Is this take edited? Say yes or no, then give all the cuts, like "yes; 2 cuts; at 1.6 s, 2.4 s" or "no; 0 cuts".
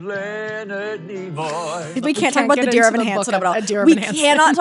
yes; 1 cut; at 1.9 s